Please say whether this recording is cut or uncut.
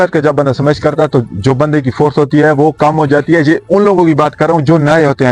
uncut